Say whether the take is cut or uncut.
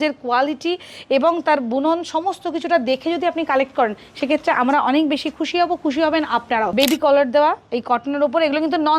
cut